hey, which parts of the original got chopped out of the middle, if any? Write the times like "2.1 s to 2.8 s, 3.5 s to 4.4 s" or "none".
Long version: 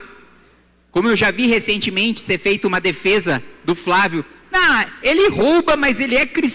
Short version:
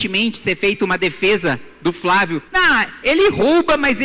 4.3 s to 4.5 s